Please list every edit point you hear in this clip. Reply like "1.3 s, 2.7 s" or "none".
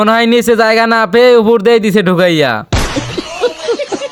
none